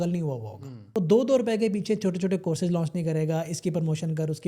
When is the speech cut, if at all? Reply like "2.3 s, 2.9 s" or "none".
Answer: 0.9 s